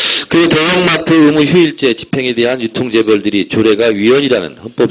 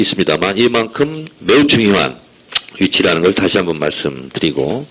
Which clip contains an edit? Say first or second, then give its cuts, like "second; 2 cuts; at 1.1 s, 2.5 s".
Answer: second; 1 cut; at 0.9 s